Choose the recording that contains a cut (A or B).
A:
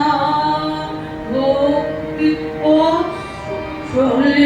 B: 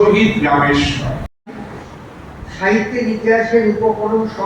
B